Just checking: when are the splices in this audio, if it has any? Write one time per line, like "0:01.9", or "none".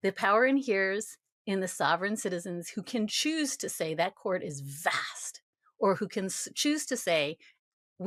none